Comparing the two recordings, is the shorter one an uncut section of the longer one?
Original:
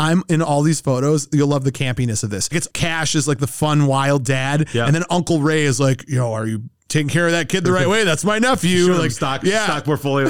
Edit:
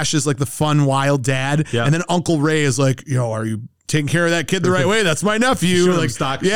yes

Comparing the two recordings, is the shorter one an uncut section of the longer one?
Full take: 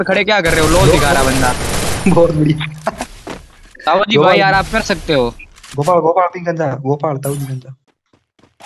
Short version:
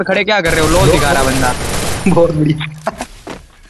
yes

